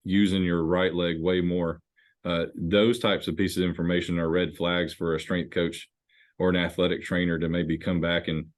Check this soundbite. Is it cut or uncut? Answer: uncut